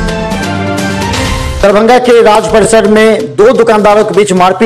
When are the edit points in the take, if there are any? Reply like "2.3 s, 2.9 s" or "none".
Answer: 1.5 s